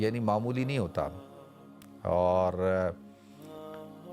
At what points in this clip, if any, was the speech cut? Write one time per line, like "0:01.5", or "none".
none

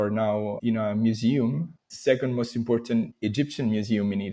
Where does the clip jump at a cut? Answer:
0:01.9

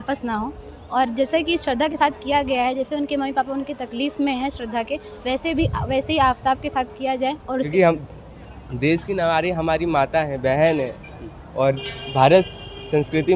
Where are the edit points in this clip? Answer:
0:07.7

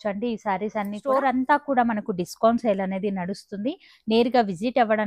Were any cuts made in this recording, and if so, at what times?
0:01.0

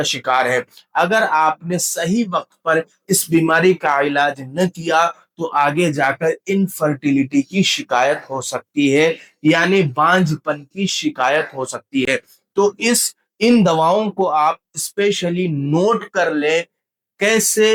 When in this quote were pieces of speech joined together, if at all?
none

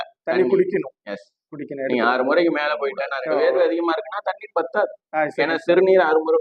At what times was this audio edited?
0:03.1

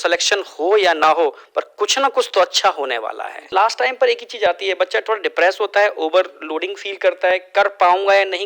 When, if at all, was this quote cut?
0:03.5

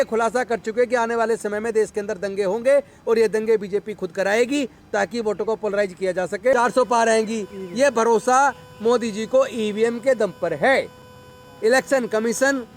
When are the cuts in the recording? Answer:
0:06.5

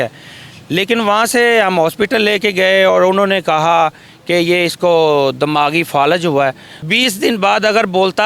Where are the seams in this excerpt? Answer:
0:06.7

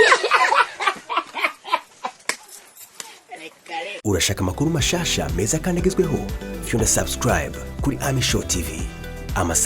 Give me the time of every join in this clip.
0:03.9

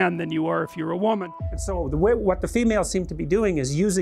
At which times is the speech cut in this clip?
0:01.5

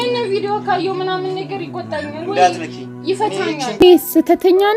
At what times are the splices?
0:03.8

